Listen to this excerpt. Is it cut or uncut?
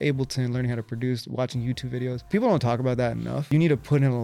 cut